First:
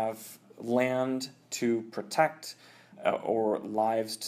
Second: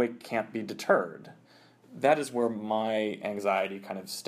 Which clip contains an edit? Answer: second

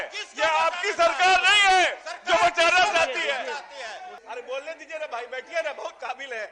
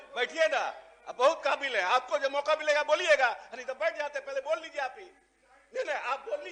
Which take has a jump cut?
first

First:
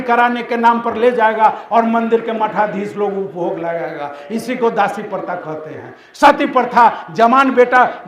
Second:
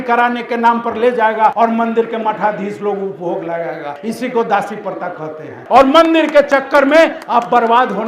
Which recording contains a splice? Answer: second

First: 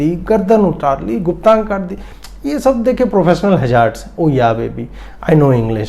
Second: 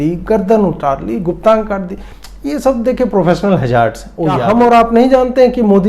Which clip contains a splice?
second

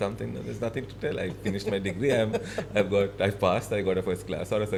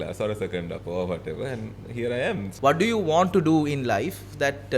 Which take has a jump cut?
second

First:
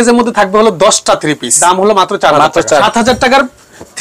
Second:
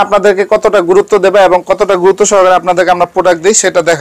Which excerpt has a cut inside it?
first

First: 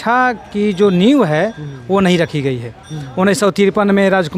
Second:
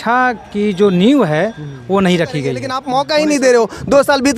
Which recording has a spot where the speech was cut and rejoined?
second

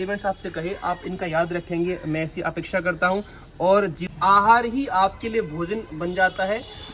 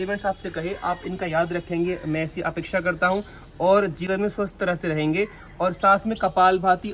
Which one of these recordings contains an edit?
first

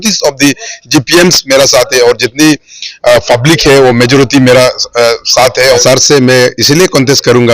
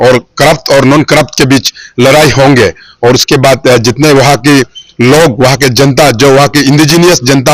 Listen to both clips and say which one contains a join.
first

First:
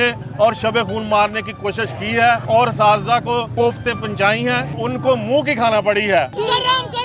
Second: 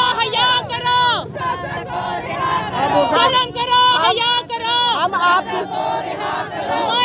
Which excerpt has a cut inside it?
first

